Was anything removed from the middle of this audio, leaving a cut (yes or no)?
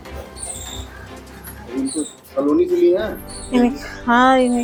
no